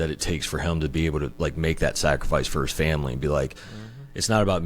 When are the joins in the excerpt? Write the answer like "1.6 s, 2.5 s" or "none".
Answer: 1.3 s